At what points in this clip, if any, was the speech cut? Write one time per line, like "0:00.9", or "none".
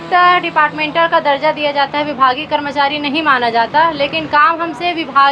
none